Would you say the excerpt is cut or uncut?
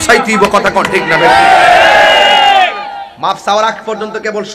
uncut